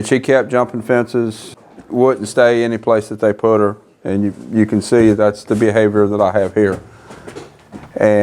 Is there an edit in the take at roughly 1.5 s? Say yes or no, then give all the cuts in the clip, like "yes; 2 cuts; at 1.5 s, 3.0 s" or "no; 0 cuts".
yes; 1 cut; at 1.5 s